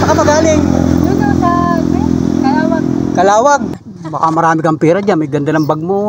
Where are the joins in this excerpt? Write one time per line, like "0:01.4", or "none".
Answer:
0:03.8